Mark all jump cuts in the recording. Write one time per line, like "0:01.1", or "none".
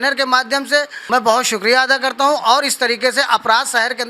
0:01.0